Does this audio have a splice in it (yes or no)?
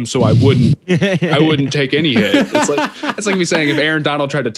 yes